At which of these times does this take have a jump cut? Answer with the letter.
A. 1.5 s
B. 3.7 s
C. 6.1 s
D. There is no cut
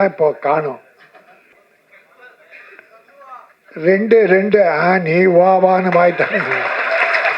A